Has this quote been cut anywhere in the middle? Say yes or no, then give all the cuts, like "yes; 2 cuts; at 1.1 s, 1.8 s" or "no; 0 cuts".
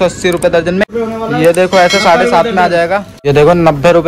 yes; 2 cuts; at 0.8 s, 3.1 s